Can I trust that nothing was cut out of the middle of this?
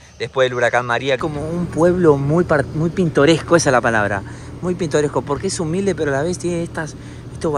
no; 1 cut; at 1.2 s

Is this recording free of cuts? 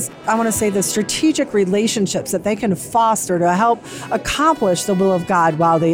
yes; 0 cuts

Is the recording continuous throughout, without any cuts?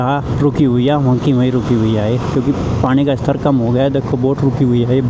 yes; 0 cuts

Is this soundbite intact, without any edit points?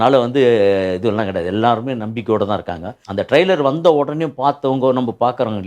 no; 1 cut; at 3.0 s

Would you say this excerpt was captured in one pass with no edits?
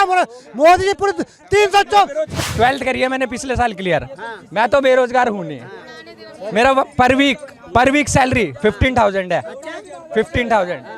no; 1 cut; at 2.4 s

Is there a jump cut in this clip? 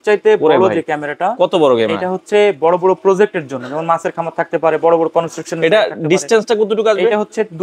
no; 0 cuts

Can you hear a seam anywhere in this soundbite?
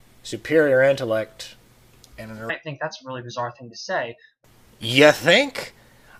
no; 0 cuts

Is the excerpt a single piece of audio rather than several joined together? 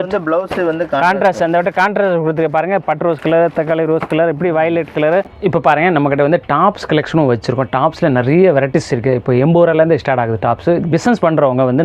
no; 1 cut; at 5.3 s

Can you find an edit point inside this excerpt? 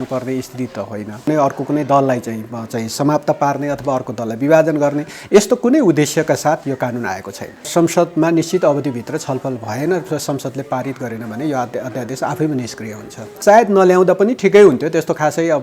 yes; 3 cuts; at 1.3 s, 7.7 s, 13.3 s

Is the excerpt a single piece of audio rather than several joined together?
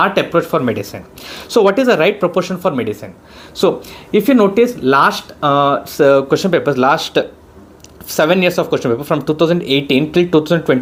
yes; 0 cuts

